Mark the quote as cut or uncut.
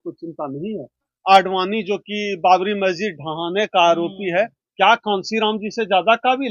cut